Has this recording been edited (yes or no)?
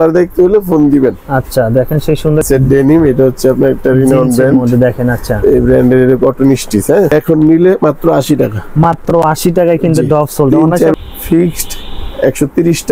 yes